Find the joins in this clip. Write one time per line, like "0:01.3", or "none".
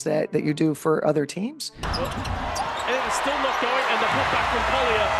0:01.8